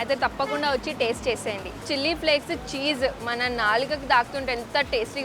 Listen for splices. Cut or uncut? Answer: cut